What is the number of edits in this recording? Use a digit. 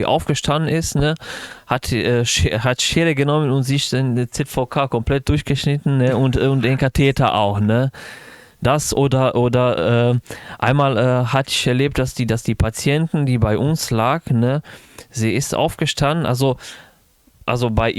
0